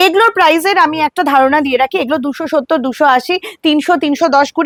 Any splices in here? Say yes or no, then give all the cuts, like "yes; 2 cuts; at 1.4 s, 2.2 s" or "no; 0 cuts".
no; 0 cuts